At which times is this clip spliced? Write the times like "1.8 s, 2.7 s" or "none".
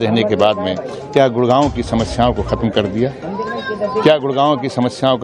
none